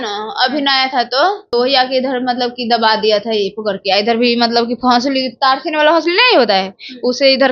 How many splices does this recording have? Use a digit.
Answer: 1